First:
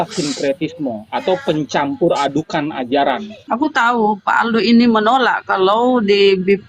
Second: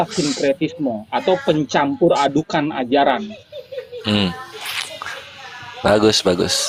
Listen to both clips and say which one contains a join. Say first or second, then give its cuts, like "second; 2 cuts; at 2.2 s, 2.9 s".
first; 1 cut; at 3.4 s